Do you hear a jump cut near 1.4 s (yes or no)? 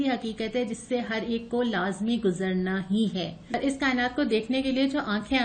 no